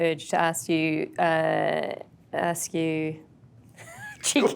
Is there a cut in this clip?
no; 0 cuts

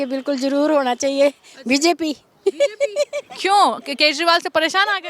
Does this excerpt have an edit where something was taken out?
no; 0 cuts

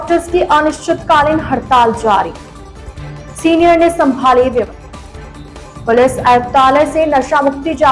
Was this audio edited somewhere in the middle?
yes; 1 cut; at 4.7 s

